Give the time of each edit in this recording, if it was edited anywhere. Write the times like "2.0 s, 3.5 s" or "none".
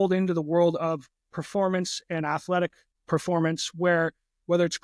2.9 s